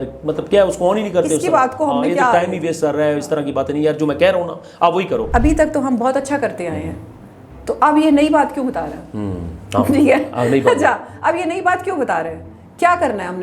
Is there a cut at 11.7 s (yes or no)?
no